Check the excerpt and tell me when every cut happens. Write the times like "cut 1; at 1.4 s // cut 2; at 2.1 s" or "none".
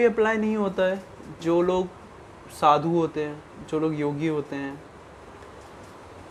none